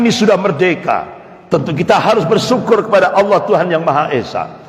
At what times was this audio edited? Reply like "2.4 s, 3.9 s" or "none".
none

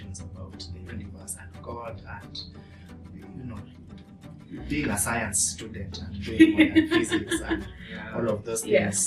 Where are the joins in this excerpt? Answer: none

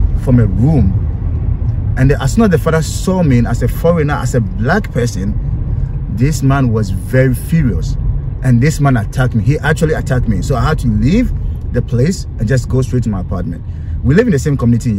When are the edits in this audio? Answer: none

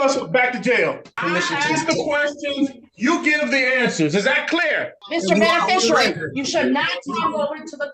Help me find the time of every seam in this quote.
1.2 s, 5.0 s

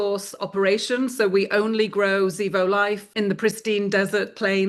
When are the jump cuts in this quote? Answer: 3.1 s

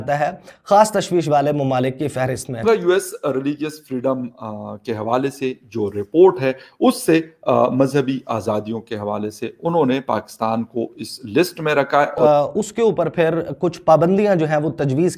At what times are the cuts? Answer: 2.5 s, 12.2 s

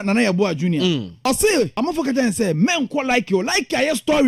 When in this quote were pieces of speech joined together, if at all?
1.2 s, 1.7 s

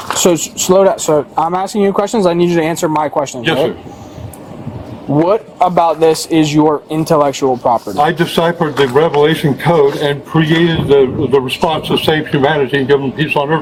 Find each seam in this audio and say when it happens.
none

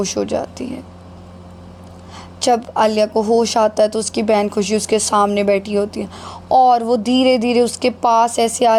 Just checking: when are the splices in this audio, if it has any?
none

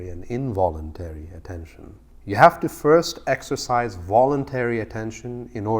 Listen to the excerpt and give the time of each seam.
2.1 s

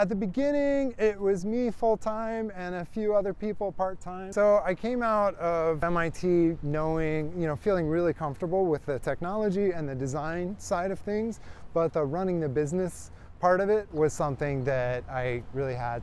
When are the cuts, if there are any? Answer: 4.1 s, 5.8 s

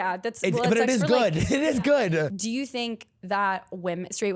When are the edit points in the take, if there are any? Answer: 2.3 s

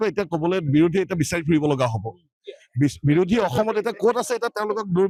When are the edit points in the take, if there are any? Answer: none

